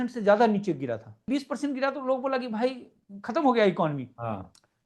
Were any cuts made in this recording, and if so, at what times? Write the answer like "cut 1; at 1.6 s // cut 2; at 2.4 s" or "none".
cut 1; at 1.2 s